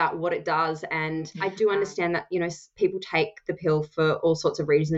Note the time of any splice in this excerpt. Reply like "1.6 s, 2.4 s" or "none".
1.3 s